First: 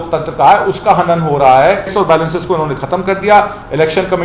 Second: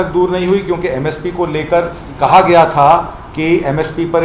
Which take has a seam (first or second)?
first